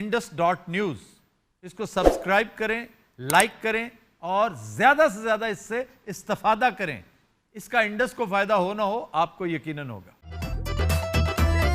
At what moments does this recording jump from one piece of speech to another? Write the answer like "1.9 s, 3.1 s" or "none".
10.2 s

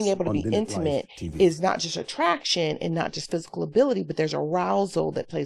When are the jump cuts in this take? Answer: none

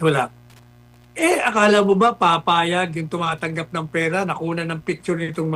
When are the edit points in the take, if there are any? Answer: none

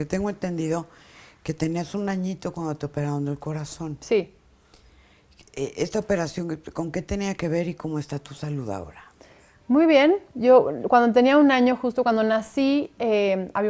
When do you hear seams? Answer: none

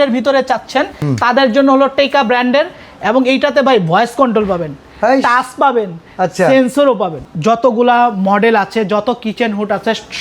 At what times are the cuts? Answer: 1.0 s, 7.2 s

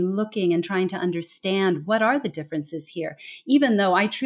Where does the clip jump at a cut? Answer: none

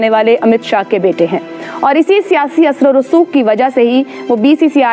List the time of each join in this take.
none

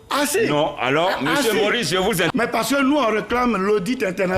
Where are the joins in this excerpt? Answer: 2.3 s

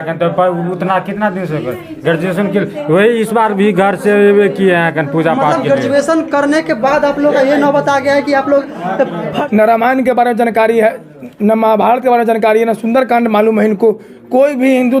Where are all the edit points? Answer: 9.3 s

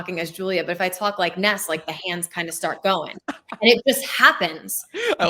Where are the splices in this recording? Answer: none

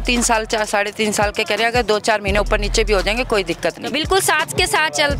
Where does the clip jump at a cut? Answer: 3.8 s

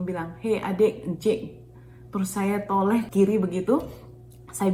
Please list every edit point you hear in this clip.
3.1 s

